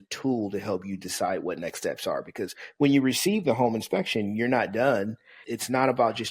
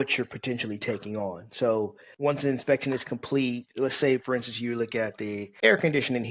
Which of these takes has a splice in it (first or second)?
second